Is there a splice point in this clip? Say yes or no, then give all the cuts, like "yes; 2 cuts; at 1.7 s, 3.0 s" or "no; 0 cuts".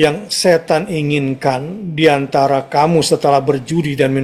no; 0 cuts